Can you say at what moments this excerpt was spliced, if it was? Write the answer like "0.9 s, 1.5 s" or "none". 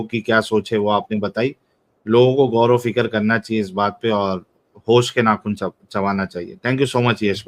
none